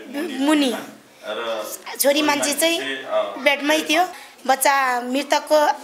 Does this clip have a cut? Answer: yes; 1 cut; at 4.3 s

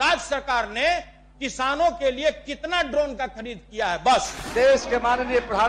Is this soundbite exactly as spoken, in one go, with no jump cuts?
no; 1 cut; at 4.4 s

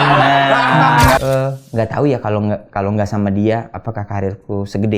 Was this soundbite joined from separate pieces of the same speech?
yes; 1 cut; at 1.2 s

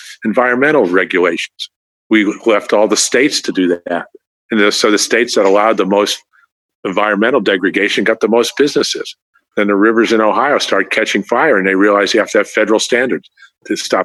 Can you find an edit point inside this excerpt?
no; 0 cuts

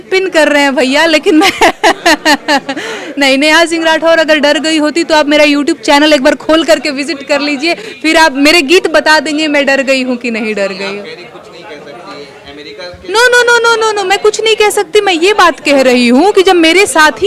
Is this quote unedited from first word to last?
yes; 0 cuts

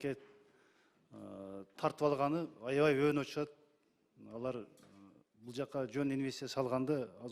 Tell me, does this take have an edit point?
no; 0 cuts

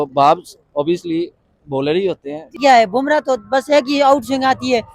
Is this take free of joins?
no; 1 cut; at 2.6 s

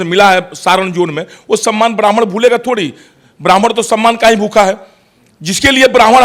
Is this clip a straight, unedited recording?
yes; 0 cuts

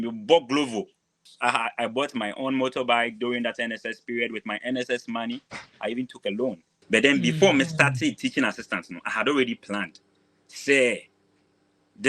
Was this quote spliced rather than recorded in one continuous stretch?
yes; 2 cuts; at 1.3 s, 6.7 s

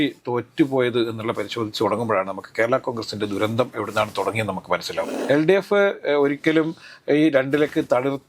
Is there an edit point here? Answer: yes; 1 cut; at 5.1 s

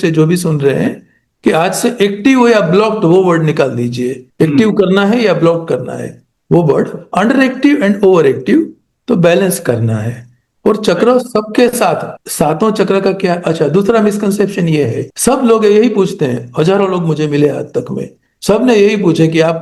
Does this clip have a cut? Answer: no; 0 cuts

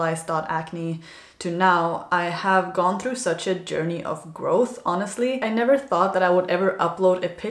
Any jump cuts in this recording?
yes; 1 cut; at 5.4 s

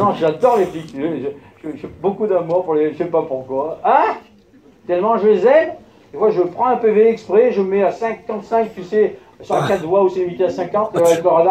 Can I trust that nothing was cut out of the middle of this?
no; 1 cut; at 5.5 s

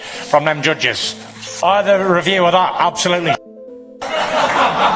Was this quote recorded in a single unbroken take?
no; 1 cut; at 1.4 s

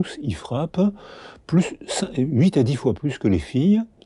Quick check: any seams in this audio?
no; 0 cuts

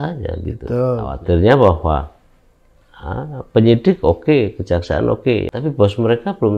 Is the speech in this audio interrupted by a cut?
yes; 2 cuts; at 1.1 s, 5.5 s

